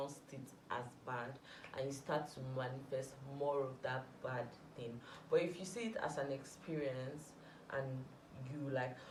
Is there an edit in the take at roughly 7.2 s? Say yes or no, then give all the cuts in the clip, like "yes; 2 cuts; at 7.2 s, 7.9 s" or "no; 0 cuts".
no; 0 cuts